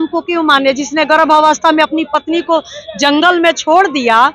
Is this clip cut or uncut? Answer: uncut